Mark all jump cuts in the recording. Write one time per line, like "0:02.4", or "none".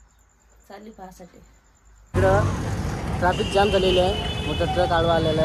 0:02.1